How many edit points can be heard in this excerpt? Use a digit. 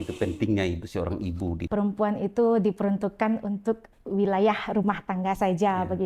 1